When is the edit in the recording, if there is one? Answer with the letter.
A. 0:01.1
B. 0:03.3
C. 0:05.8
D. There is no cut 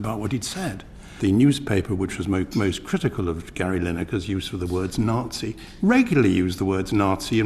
A